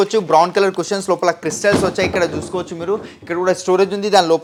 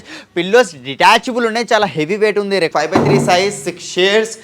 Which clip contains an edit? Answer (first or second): second